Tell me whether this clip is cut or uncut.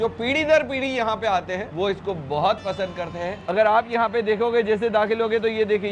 cut